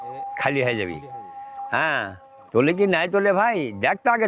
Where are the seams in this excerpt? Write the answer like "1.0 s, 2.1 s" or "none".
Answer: none